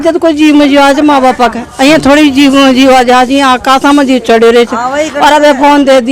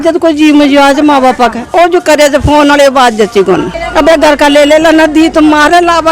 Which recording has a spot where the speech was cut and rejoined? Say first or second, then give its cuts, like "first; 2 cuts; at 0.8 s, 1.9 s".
second; 2 cuts; at 1.7 s, 3.8 s